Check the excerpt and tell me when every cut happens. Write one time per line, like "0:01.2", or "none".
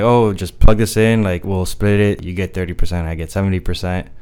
0:01.4
0:02.3